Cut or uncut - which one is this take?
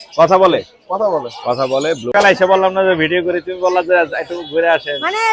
cut